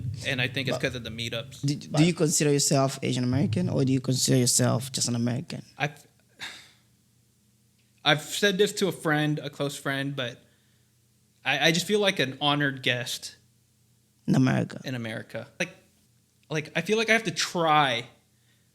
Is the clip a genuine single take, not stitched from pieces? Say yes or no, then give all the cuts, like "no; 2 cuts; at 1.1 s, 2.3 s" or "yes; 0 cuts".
no; 2 cuts; at 1.6 s, 15.6 s